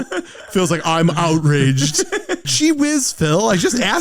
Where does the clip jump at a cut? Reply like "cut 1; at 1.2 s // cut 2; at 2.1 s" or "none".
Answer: cut 1; at 2.5 s